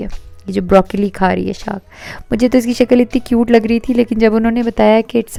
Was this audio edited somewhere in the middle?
no; 0 cuts

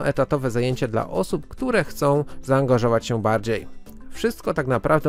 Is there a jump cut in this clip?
no; 0 cuts

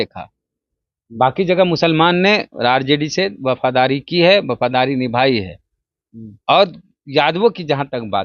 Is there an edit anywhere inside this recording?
no; 0 cuts

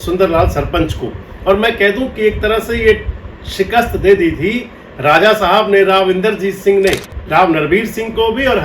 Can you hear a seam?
yes; 1 cut; at 7.1 s

